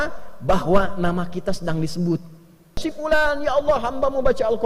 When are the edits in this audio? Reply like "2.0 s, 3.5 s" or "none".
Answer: 2.8 s